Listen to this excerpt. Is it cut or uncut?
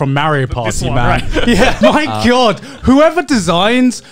cut